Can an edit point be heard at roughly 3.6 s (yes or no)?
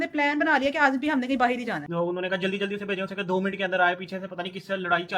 no